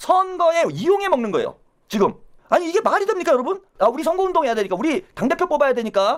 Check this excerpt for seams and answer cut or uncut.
uncut